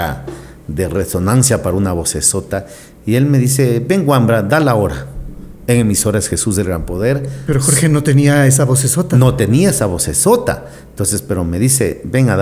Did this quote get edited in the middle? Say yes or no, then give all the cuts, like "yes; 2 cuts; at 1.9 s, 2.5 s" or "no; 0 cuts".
no; 0 cuts